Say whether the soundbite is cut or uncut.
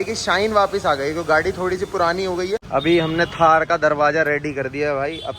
cut